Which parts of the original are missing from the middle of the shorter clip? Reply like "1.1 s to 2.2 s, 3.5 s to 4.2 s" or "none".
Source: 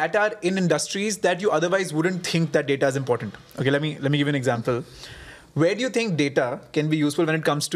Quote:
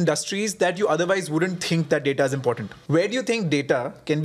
3.3 s to 5.4 s